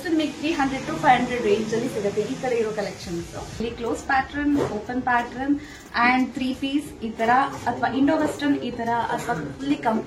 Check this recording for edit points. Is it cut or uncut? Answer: cut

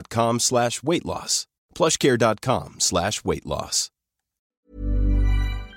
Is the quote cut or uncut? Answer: cut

